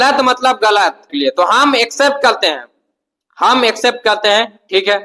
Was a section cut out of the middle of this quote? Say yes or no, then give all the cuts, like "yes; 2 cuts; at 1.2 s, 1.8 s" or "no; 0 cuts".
yes; 1 cut; at 1.1 s